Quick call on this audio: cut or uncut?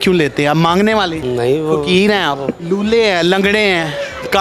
cut